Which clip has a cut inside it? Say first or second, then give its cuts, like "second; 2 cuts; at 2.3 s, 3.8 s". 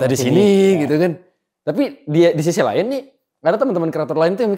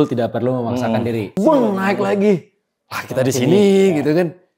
second; 1 cut; at 1.3 s